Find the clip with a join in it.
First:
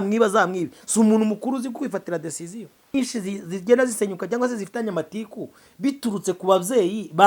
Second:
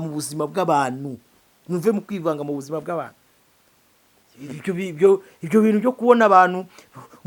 first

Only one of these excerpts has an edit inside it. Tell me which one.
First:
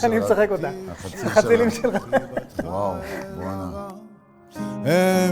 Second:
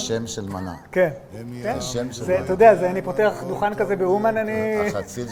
first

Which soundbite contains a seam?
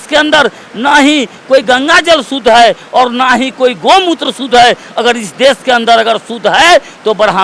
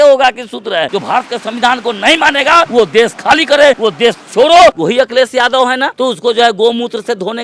second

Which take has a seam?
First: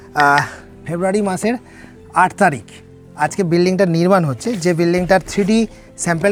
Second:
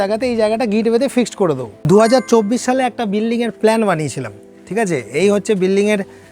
second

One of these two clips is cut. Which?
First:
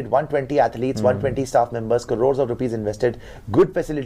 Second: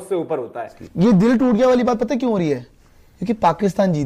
second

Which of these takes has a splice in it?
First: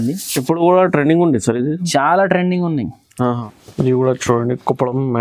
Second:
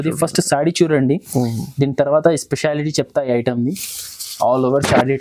first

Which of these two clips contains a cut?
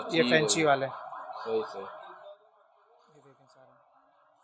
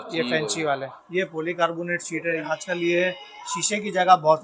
second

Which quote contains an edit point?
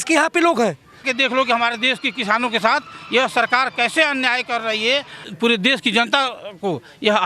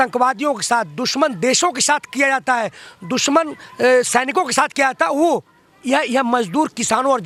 first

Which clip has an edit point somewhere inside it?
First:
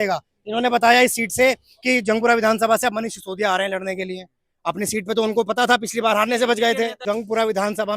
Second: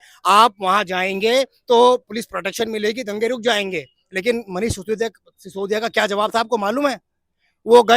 first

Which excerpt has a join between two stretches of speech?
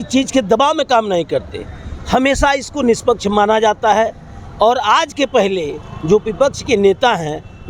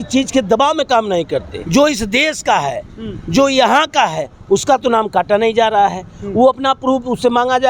second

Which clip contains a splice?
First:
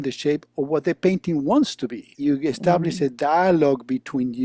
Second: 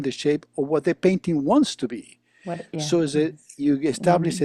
first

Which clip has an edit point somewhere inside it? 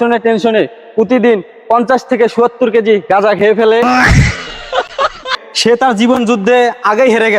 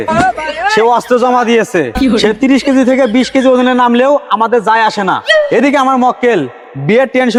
first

